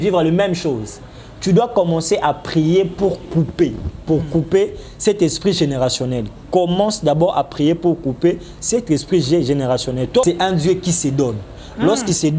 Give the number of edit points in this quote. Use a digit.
1